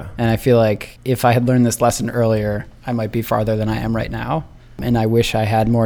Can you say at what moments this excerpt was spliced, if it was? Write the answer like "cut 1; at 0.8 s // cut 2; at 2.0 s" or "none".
cut 1; at 0.9 s // cut 2; at 4.8 s